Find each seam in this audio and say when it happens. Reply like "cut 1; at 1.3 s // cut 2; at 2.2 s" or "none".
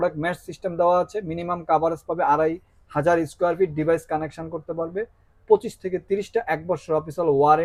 none